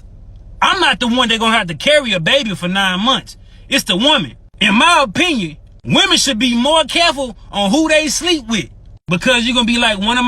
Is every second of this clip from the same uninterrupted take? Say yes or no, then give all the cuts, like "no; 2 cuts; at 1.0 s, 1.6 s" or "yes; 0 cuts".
no; 2 cuts; at 4.0 s, 9.2 s